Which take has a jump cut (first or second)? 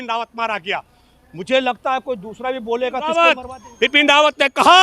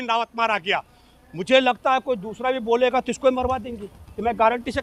first